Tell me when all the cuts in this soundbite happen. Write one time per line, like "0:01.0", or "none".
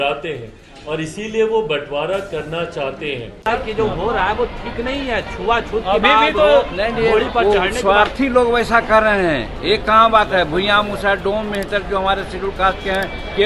0:03.3